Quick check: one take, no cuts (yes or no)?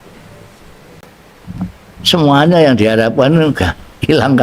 no